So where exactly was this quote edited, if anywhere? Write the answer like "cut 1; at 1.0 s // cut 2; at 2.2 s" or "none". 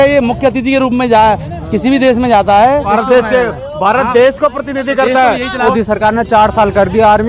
cut 1; at 2.9 s // cut 2; at 5.7 s